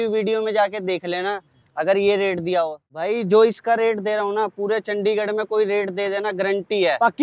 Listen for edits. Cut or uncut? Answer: cut